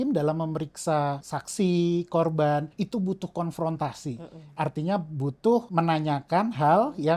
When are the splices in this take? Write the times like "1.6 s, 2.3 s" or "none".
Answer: 1.3 s, 2.7 s, 5.7 s